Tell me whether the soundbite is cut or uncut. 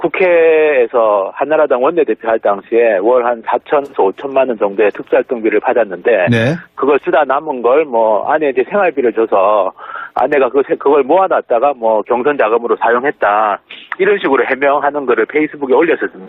uncut